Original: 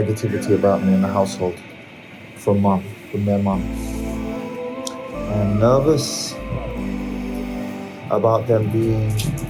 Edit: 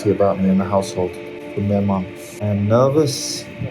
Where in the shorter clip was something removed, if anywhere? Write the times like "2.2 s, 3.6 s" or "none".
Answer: 1.4 s, 2.2 s